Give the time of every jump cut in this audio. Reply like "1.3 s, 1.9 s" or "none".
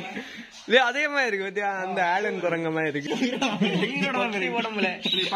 3.0 s